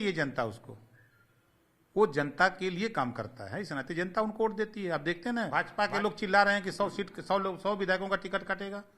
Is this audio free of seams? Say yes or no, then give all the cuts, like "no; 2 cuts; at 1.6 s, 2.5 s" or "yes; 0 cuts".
no; 1 cut; at 5.5 s